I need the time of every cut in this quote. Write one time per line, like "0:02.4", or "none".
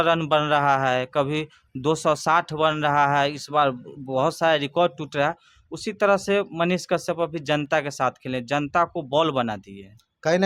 none